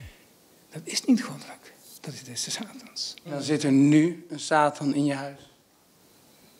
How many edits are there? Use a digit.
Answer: 1